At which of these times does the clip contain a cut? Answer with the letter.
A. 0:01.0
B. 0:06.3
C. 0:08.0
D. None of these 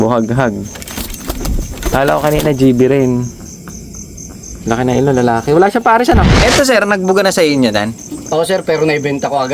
B